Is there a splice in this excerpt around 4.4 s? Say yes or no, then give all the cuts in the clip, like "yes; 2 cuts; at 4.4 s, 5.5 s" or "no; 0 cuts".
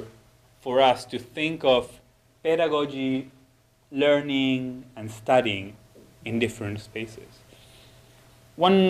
yes; 1 cut; at 4.4 s